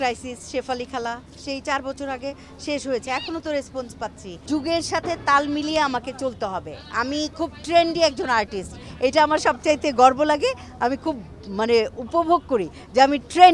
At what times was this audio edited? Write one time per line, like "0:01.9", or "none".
0:04.3